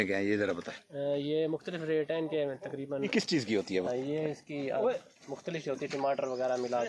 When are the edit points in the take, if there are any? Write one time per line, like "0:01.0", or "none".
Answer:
0:03.1